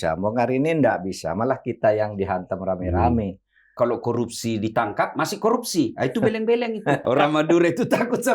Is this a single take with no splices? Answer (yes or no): no